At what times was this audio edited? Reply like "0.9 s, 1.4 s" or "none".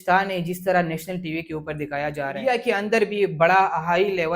2.4 s